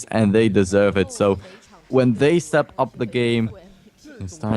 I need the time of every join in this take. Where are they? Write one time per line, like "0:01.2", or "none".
0:03.3

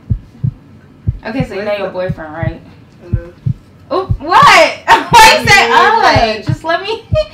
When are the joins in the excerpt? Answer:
none

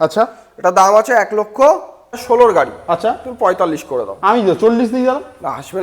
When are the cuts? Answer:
0:02.2

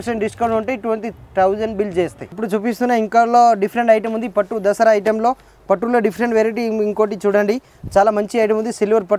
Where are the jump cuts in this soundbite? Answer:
none

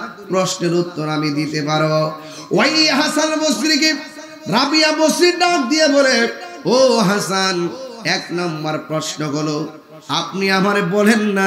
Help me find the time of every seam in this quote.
none

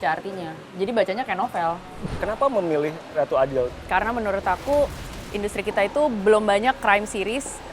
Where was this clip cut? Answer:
0:01.8
0:03.7

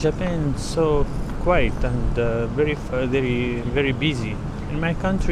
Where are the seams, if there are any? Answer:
none

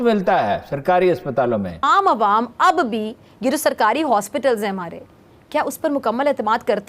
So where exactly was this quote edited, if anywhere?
0:01.8

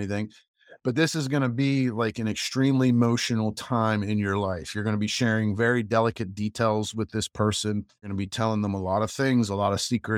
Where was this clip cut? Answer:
0:08.0

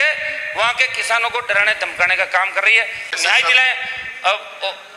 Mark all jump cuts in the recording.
0:03.1

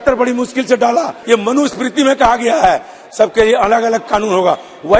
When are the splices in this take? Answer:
0:01.2

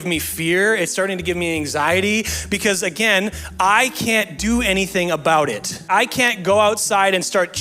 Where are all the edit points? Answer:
0:05.8

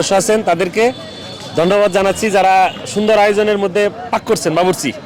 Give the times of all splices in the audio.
none

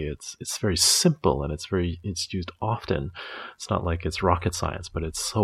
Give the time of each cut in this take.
none

